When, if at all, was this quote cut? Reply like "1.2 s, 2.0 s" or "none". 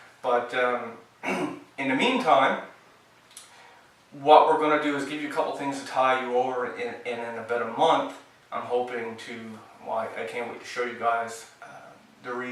none

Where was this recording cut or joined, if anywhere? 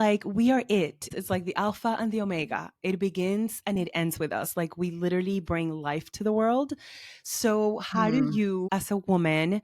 1.1 s, 8.7 s

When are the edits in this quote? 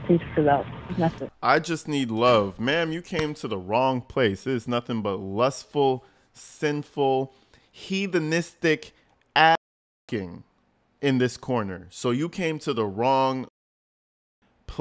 1.2 s

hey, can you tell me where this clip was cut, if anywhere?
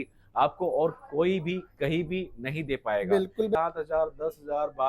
3.5 s

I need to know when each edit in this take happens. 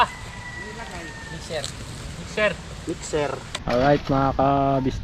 3.5 s

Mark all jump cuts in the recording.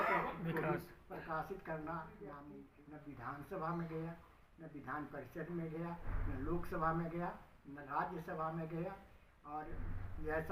2.5 s

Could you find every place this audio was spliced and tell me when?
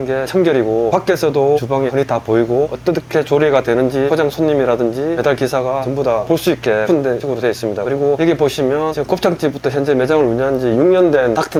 none

